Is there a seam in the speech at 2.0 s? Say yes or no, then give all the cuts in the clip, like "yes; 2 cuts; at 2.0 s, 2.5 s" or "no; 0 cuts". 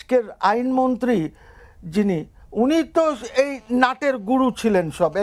no; 0 cuts